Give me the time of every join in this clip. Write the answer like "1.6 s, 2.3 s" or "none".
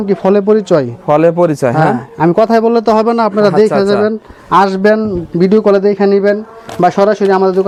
none